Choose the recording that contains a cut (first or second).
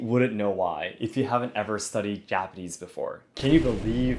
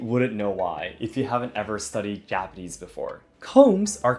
first